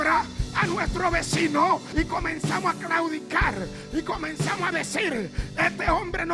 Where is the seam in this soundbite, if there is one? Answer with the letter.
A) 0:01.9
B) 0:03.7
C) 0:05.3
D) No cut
A